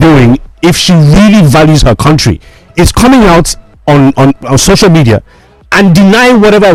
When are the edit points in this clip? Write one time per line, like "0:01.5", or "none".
none